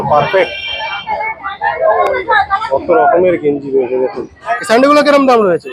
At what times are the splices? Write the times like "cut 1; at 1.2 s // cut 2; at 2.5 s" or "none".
cut 1; at 4.5 s